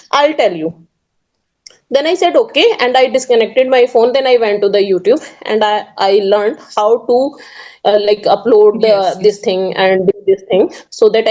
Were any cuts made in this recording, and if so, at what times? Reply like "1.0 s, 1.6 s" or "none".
none